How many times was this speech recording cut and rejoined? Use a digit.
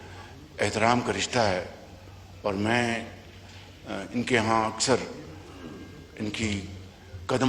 0